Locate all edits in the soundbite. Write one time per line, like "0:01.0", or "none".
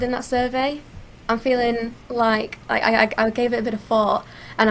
0:02.0